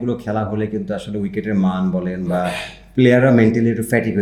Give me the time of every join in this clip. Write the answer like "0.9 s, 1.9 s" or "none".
none